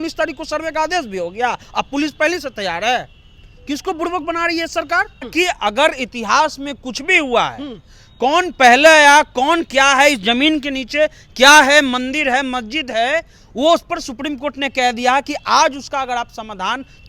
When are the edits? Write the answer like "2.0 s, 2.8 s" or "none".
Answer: 5.3 s